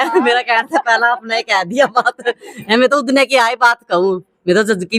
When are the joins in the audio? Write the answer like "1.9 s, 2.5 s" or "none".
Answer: none